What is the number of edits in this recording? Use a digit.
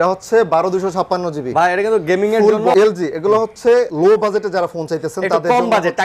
2